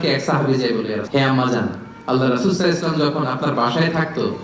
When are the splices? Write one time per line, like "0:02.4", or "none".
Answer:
0:01.0